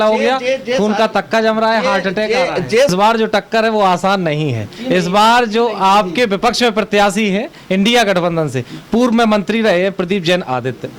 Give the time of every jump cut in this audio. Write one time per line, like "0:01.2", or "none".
0:02.9